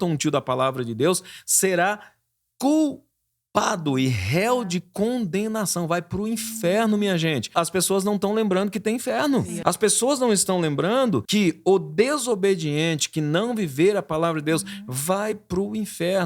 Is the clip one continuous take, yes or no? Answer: no